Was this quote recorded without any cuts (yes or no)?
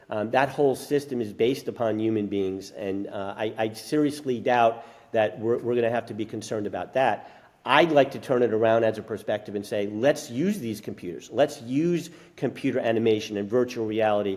yes